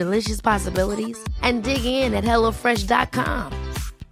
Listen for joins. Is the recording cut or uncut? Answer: uncut